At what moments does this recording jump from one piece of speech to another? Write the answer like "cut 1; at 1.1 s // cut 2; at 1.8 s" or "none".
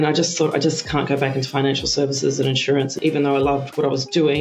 cut 1; at 3.0 s